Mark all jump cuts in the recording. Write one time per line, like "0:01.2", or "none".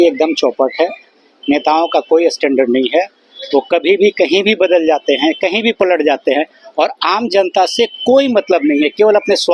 none